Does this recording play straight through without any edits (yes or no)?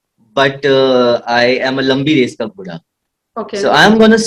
yes